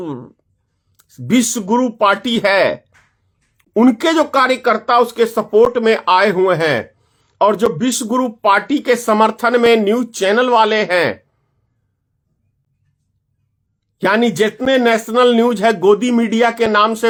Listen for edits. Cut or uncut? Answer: uncut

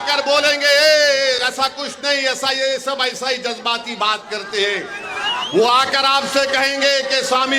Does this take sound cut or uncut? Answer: uncut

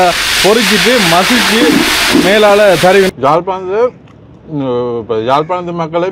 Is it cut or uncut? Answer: cut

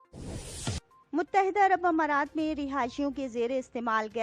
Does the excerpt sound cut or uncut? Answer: cut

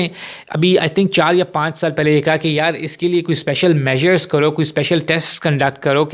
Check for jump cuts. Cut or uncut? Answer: uncut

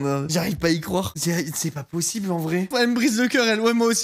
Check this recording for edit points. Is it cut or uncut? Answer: uncut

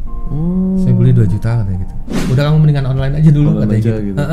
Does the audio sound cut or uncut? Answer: cut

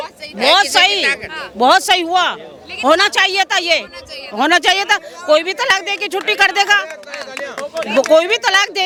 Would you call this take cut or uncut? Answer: uncut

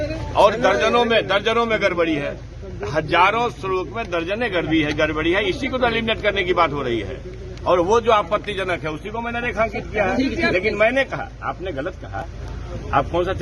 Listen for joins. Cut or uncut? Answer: uncut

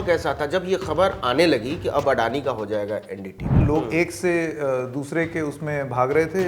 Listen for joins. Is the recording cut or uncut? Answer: cut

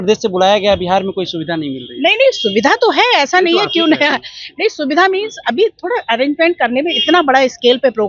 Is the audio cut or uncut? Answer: uncut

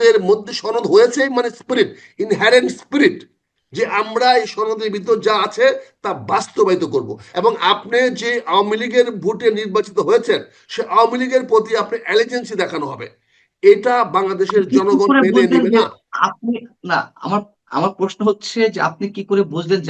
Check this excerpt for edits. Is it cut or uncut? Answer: cut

